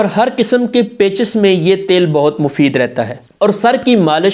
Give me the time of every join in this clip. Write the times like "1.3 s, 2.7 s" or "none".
none

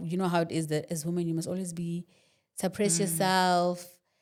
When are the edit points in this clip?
none

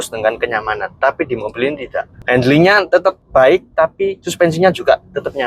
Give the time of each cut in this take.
2.1 s, 2.9 s, 4.2 s

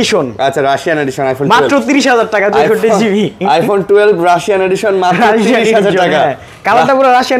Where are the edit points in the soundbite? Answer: none

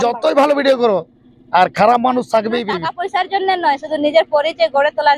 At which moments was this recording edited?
2.8 s

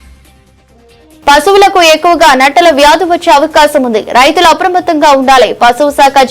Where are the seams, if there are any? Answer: 1.2 s

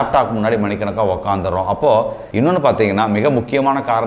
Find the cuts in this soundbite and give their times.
2.2 s

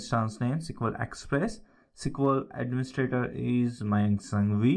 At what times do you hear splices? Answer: none

